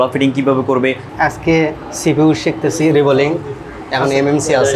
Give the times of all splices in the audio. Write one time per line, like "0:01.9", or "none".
0:01.1